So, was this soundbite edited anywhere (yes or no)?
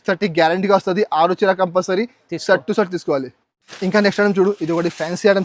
no